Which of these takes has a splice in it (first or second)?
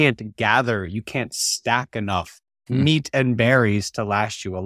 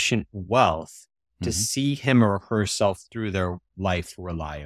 first